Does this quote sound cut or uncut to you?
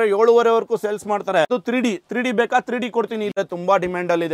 cut